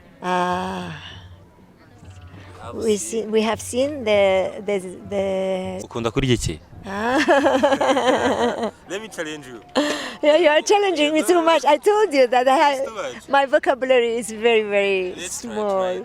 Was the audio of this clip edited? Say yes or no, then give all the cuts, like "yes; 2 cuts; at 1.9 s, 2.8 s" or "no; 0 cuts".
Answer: yes; 1 cut; at 5.8 s